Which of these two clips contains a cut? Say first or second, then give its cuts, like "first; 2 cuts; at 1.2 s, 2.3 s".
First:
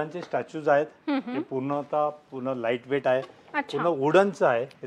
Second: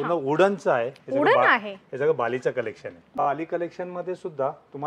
second; 1 cut; at 3.3 s